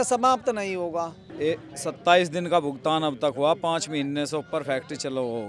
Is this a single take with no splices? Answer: no; 1 cut; at 1.2 s

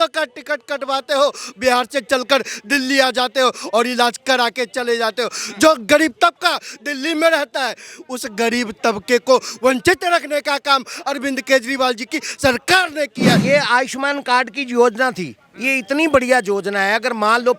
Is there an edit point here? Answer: yes; 1 cut; at 13.4 s

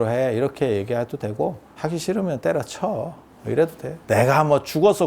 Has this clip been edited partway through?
yes; 2 cuts; at 1.7 s, 3.9 s

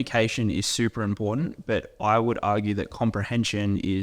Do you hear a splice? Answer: no; 0 cuts

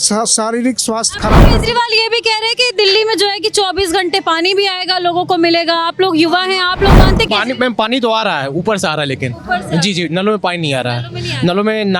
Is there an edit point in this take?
no; 0 cuts

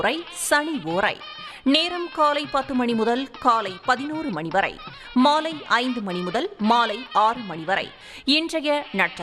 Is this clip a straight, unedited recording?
no; 1 cut; at 8.0 s

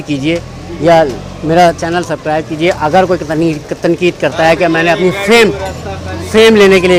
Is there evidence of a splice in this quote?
no; 0 cuts

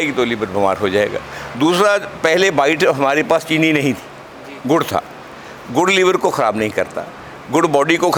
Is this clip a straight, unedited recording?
yes; 0 cuts

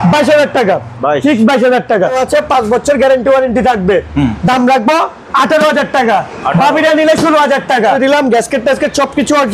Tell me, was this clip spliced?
yes; 2 cuts; at 2.2 s, 8.0 s

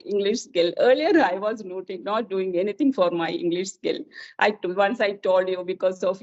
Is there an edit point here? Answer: no; 0 cuts

